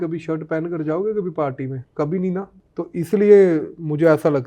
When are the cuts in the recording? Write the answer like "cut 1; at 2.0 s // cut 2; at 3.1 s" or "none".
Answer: cut 1; at 1.8 s // cut 2; at 2.6 s